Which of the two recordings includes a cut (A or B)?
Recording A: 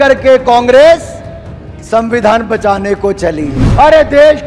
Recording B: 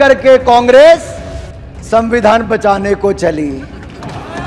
A